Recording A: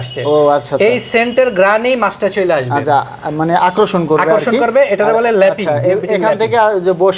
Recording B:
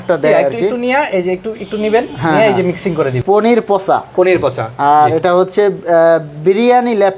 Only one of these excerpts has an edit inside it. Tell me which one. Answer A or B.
B